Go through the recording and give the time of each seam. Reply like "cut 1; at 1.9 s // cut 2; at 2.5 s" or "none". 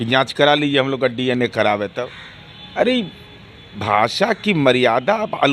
none